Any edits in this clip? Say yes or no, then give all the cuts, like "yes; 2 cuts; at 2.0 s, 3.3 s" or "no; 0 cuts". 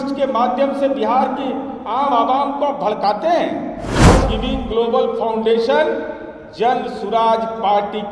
yes; 1 cut; at 3.9 s